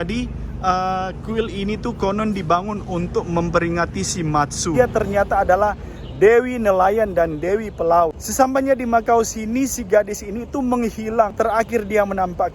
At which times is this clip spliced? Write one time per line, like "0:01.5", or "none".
0:04.7
0:08.2
0:11.3